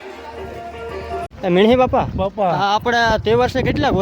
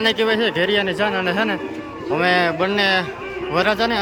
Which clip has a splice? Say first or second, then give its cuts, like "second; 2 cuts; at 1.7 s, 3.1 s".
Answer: first; 1 cut; at 1.3 s